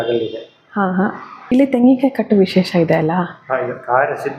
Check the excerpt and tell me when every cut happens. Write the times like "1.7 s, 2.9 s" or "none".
1.5 s

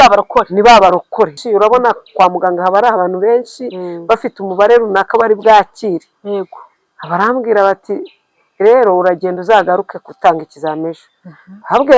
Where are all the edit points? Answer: 1.4 s

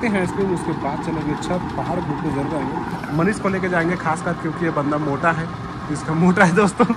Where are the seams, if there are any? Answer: none

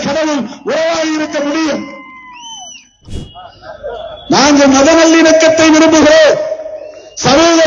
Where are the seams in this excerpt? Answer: 3.0 s

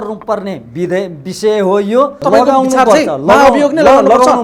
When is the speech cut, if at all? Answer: 2.2 s

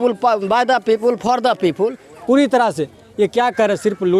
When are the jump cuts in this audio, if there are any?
2.1 s

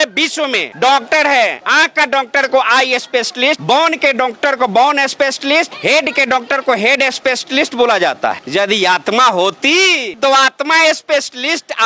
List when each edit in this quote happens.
none

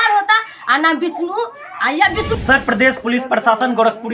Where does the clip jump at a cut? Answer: 2.3 s

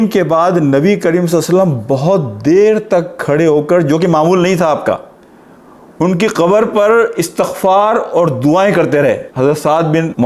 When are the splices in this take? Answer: none

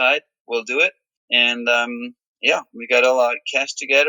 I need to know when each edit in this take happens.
1.2 s

